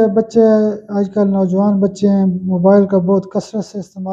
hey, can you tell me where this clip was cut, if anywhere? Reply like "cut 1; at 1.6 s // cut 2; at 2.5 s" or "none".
none